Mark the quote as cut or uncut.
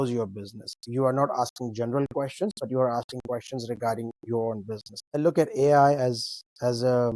cut